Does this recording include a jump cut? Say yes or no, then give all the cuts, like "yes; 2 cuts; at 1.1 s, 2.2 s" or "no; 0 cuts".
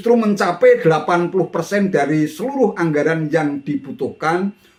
no; 0 cuts